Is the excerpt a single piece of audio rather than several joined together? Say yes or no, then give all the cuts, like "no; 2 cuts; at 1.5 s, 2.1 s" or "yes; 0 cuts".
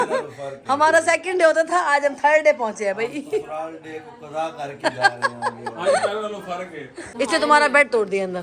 no; 1 cut; at 7.0 s